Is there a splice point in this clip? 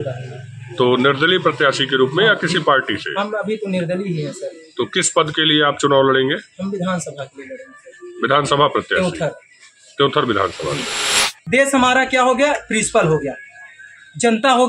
yes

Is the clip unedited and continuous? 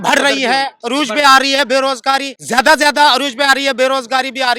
no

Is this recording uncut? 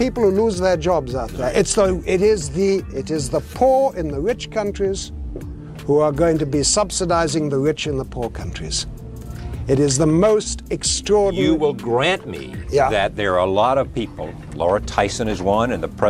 yes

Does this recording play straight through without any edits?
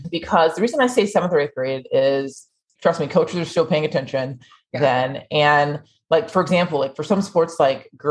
yes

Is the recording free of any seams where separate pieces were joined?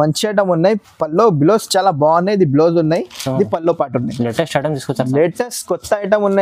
yes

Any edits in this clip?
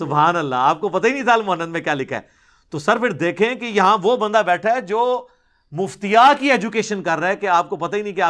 no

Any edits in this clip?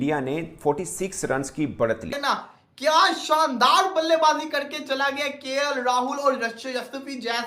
yes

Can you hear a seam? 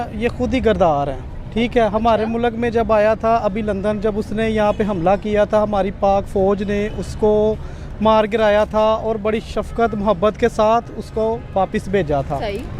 no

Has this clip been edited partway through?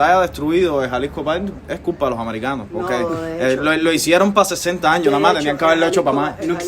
yes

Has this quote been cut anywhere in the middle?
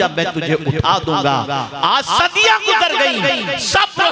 no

